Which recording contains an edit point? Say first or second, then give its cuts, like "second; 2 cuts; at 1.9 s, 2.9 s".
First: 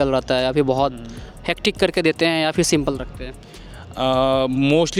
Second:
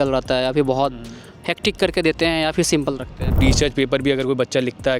second; 1 cut; at 3.4 s